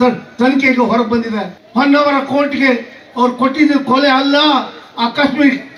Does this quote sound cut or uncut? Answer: cut